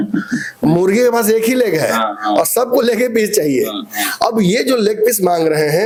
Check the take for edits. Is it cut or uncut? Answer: uncut